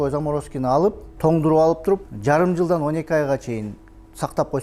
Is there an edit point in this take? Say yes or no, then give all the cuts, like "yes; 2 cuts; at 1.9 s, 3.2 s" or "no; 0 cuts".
yes; 2 cuts; at 1.1 s, 2.1 s